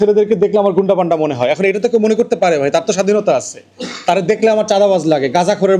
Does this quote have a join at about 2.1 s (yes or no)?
no